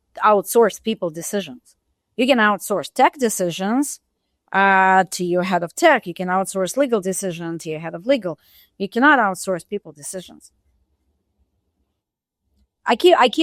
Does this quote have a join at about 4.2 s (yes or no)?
no